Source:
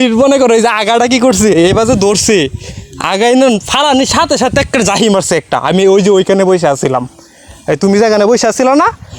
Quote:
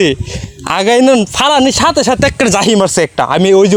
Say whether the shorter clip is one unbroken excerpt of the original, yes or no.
yes